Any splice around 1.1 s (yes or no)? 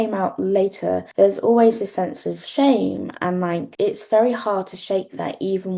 yes